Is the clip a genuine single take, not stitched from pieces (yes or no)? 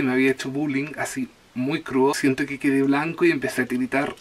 no